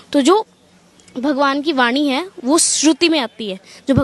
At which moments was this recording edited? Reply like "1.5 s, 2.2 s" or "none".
none